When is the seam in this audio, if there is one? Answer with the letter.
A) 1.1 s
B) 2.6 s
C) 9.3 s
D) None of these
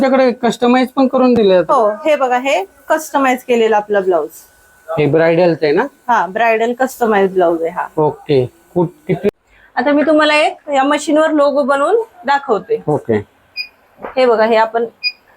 C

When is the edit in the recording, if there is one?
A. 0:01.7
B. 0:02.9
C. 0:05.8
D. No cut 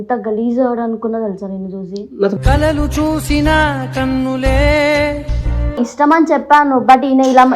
C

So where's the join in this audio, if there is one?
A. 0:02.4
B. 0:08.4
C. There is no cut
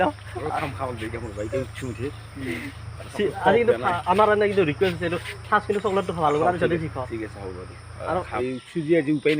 B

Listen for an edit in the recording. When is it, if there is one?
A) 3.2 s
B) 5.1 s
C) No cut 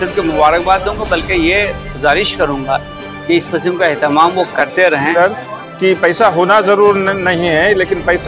B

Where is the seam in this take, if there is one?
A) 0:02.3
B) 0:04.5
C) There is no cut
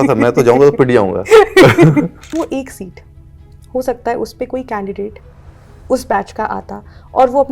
A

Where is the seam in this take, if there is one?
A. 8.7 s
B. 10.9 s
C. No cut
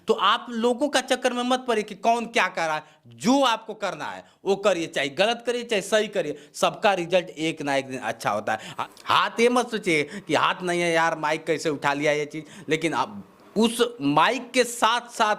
A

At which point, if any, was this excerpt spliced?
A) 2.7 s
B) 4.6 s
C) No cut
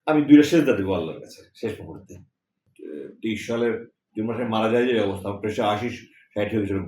A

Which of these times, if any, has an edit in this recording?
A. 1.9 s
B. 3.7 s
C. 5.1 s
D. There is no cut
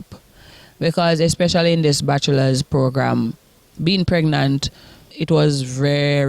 C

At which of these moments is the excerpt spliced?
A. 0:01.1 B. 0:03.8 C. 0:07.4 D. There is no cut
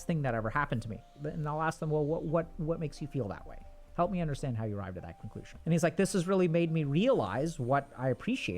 A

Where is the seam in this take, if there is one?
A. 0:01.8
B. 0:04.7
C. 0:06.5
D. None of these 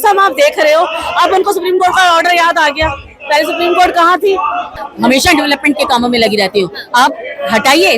B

